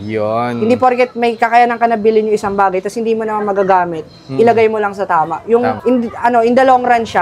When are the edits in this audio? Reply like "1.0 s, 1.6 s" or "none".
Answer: 5.8 s